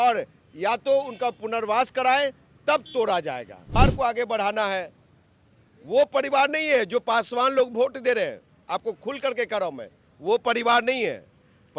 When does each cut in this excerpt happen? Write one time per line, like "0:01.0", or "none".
0:03.7

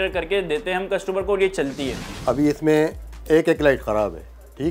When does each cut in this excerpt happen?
0:02.1

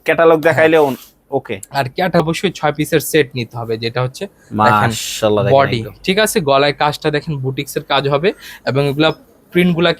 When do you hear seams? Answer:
0:02.2

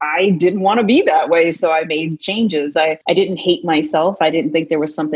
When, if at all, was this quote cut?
0:03.0

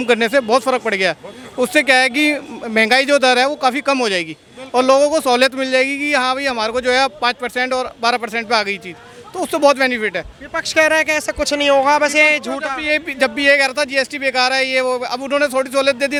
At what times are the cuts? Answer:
none

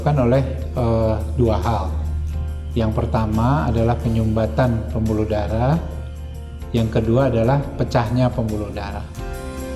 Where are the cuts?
none

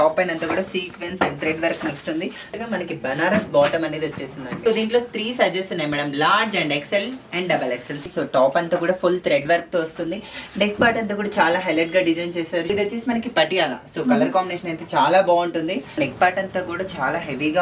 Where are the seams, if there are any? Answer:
0:02.6
0:04.5
0:08.1
0:12.7
0:16.0

